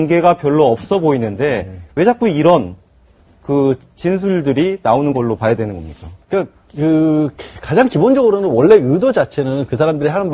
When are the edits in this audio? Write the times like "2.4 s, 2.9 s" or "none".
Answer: 3.9 s